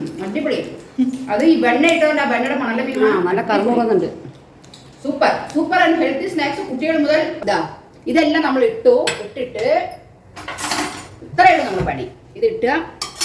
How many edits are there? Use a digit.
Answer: 1